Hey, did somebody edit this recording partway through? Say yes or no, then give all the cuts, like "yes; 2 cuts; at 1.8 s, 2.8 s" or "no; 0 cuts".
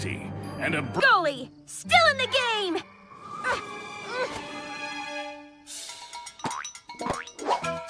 no; 0 cuts